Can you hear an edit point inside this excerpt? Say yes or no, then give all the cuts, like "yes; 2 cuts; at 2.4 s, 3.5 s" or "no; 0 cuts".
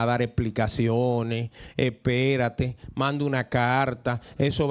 no; 0 cuts